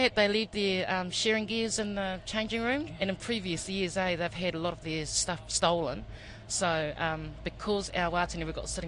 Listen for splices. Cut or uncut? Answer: cut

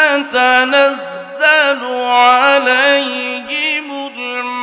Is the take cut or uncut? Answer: uncut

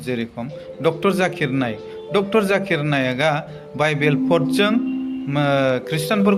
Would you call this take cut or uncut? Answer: uncut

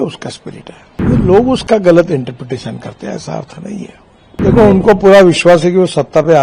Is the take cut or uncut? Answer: cut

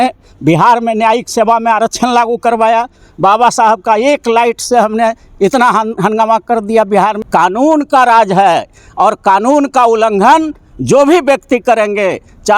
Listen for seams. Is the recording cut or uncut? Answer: cut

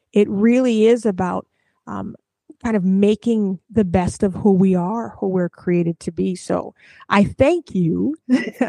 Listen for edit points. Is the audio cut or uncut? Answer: uncut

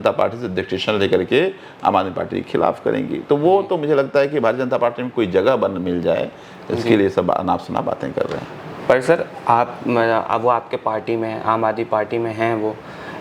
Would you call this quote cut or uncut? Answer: uncut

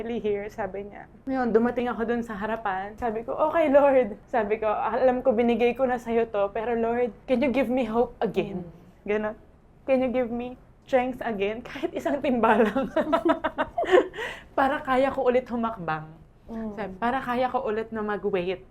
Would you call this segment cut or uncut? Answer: uncut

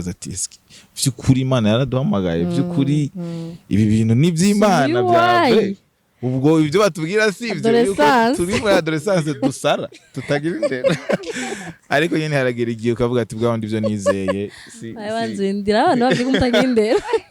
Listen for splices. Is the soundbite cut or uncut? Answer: uncut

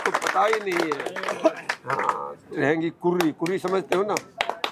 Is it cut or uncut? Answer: cut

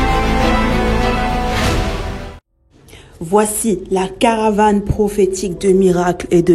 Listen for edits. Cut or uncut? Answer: uncut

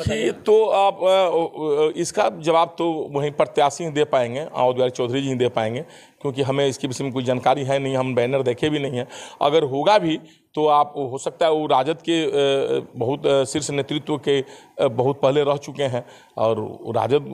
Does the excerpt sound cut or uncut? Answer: uncut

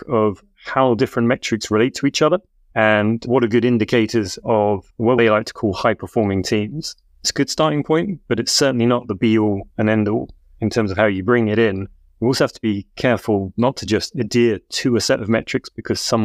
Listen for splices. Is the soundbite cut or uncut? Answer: cut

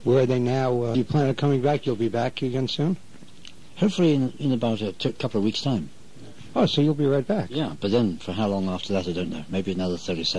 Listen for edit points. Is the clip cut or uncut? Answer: uncut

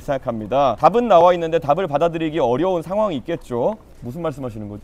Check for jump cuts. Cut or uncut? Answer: cut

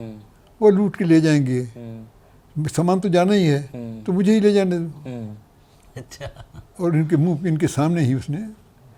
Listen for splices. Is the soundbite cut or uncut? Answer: uncut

